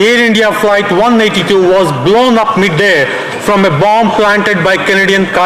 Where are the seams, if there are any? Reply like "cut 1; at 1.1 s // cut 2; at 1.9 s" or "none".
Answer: none